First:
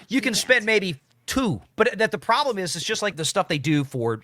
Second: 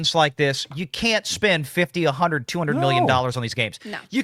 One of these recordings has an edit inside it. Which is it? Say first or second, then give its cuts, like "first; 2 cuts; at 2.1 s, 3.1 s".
first; 2 cuts; at 1.6 s, 3.2 s